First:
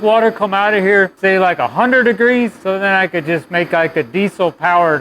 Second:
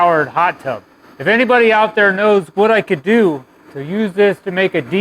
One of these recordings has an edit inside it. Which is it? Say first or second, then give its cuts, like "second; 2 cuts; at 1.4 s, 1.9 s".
first; 2 cuts; at 1.1 s, 2.6 s